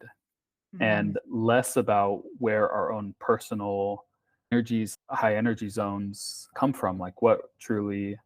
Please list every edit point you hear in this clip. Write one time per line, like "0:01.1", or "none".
0:04.9
0:06.5

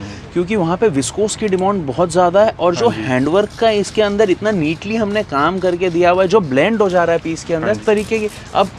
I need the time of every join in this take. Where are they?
0:07.8

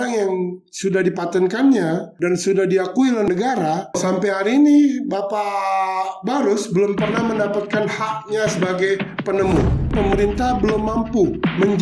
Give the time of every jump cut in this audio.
0:09.9

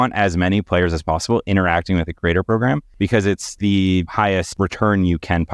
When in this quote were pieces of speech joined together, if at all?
0:02.9

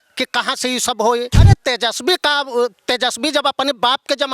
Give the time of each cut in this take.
0:01.4

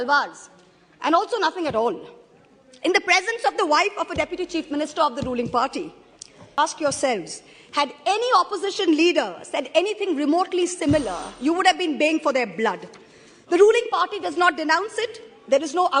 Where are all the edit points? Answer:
0:06.5

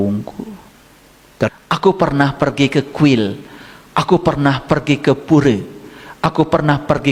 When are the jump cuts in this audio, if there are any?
0:01.5

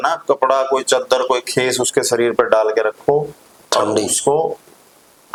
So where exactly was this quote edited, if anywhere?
none

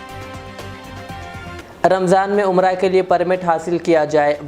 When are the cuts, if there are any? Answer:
0:01.6

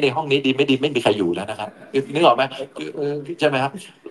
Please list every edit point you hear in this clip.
none

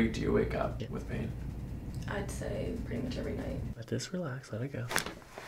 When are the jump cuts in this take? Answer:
0:00.8
0:03.8

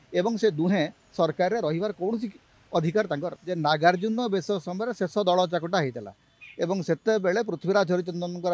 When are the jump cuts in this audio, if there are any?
0:03.4

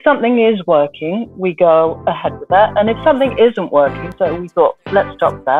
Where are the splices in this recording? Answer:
0:04.1

